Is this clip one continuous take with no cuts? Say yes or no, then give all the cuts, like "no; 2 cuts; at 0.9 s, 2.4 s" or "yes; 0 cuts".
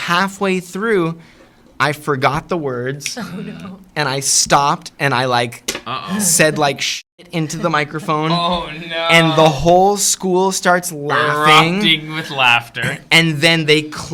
yes; 0 cuts